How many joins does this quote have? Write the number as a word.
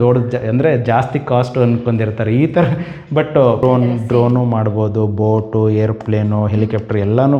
one